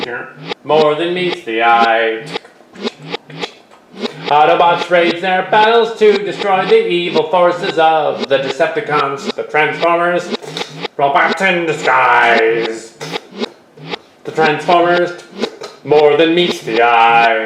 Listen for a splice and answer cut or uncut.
uncut